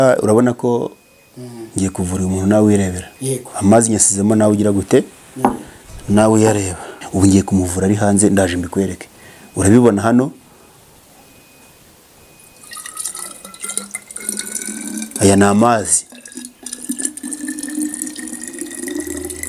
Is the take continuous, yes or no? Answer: no